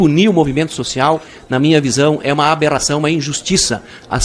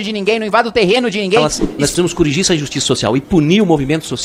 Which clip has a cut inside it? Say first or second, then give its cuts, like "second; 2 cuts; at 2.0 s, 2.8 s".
second; 1 cut; at 1.4 s